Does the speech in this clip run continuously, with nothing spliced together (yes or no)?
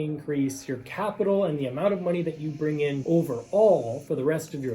no